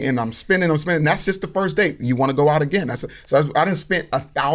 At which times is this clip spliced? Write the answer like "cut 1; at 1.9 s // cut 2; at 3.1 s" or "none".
none